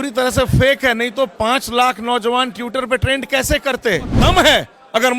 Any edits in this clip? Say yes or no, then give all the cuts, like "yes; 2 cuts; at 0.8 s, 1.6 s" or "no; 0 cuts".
yes; 1 cut; at 4.1 s